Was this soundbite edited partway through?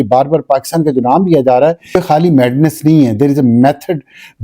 yes; 1 cut; at 2.0 s

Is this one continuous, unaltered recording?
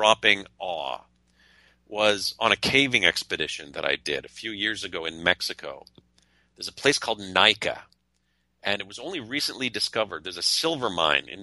yes; 0 cuts

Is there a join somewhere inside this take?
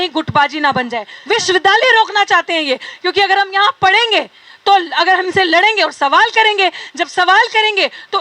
yes; 1 cut; at 1.1 s

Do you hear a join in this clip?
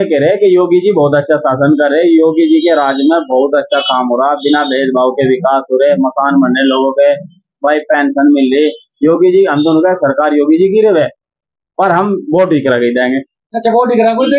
no; 0 cuts

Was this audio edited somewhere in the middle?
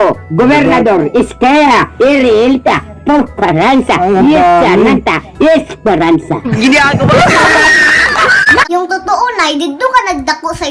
no; 0 cuts

